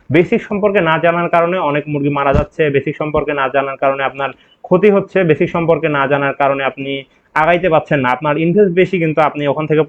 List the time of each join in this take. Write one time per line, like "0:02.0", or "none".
none

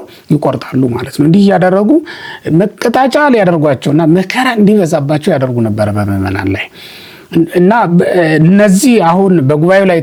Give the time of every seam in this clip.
none

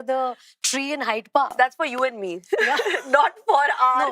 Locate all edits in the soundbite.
0:01.5

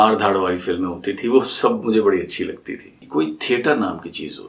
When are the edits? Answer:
0:03.0

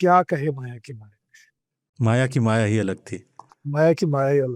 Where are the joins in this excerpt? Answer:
none

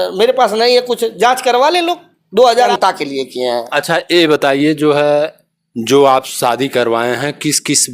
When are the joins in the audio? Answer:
0:02.6

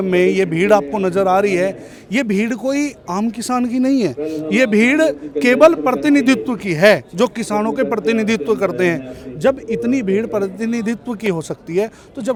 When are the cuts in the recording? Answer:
none

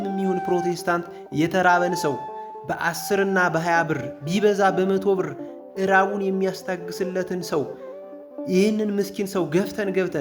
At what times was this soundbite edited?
none

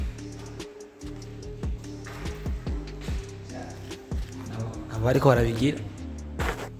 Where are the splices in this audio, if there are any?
0:04.9

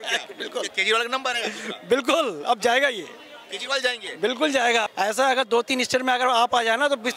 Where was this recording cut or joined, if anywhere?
0:04.9

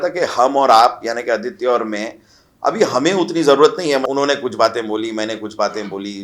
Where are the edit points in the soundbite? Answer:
0:04.1

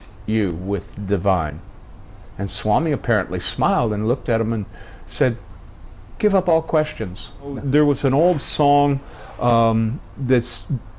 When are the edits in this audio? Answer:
0:07.6

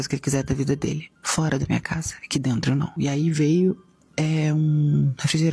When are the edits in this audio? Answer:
0:03.0

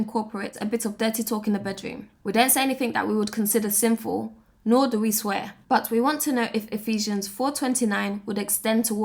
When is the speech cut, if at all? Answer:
none

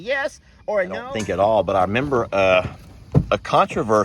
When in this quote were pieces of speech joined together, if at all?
0:01.1

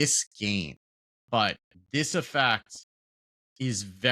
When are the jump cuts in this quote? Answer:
0:01.2

